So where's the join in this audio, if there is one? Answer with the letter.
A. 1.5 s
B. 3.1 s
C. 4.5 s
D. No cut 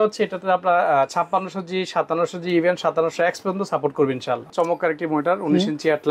C